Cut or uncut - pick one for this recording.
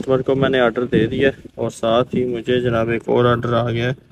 uncut